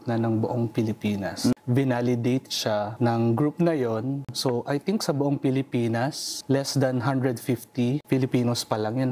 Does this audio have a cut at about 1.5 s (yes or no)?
yes